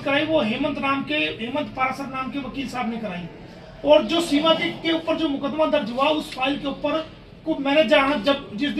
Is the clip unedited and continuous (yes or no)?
yes